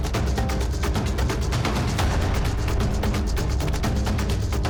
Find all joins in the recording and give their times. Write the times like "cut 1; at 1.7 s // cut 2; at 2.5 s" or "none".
none